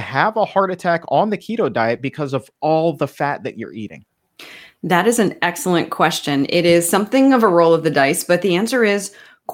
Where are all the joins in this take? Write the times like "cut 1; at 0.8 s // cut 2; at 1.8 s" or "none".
none

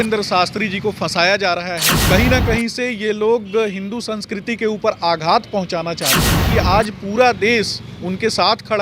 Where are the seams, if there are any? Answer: cut 1; at 1.9 s // cut 2; at 6.4 s

